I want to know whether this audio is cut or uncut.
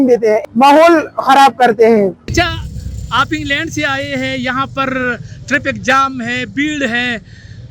cut